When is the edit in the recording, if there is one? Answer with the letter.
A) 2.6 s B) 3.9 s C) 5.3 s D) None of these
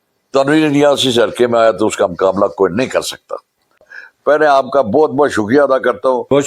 B